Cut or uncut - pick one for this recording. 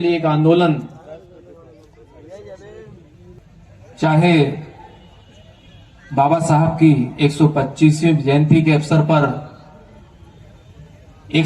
cut